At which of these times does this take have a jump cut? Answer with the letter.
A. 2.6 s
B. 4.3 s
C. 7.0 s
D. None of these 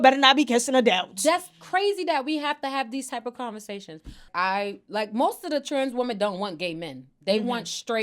B